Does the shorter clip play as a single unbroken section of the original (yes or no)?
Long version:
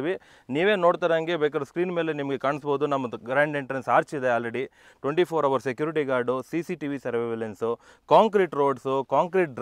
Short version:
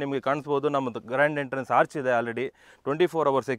yes